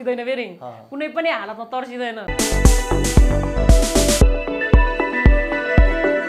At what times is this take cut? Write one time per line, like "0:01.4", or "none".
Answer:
0:02.2